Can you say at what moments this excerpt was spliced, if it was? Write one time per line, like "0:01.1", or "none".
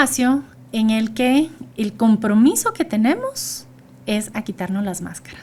none